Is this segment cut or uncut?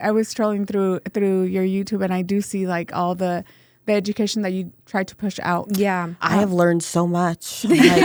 uncut